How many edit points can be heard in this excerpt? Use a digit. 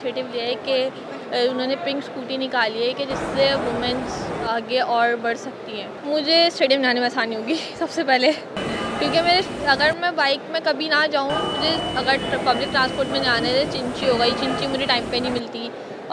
0